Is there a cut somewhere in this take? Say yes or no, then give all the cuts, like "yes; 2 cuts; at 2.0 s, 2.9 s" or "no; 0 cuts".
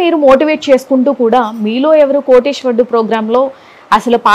no; 0 cuts